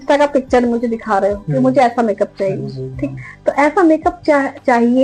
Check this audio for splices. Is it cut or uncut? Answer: uncut